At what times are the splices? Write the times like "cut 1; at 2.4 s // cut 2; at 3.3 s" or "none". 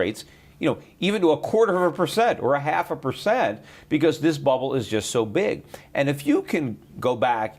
cut 1; at 3.7 s